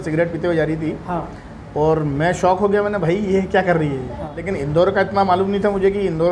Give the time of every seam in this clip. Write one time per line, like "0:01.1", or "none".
0:04.4